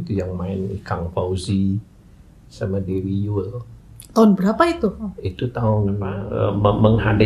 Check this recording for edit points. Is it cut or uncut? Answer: cut